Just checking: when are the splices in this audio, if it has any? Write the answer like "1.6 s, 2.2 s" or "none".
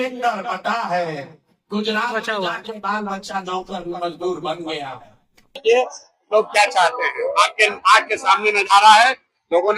5.5 s